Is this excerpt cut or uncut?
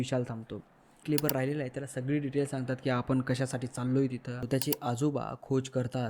cut